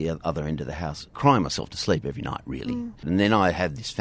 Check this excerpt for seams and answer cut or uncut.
cut